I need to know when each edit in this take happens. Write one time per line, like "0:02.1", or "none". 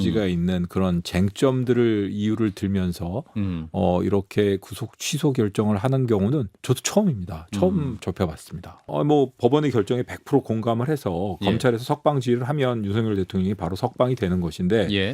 0:08.8